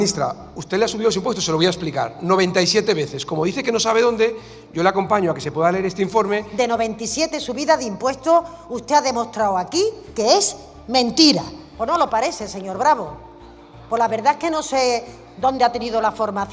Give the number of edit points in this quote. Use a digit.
2